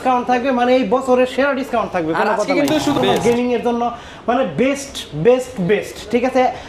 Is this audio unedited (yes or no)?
no